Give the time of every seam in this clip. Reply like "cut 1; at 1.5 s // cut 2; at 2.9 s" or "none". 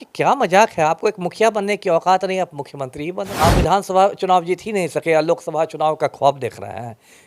cut 1; at 3.3 s